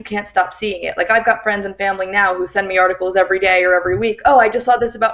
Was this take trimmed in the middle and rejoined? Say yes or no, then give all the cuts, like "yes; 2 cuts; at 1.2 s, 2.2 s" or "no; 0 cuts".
no; 0 cuts